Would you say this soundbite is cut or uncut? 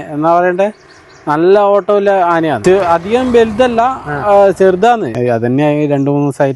cut